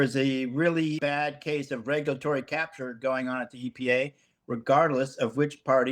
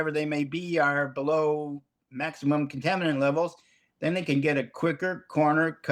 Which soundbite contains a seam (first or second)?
first